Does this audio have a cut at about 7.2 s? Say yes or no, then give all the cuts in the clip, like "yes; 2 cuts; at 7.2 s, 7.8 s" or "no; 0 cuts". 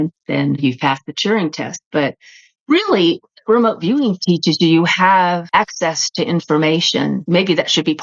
yes; 2 cuts; at 5.4 s, 7.2 s